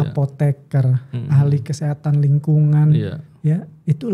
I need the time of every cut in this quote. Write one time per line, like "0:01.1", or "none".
none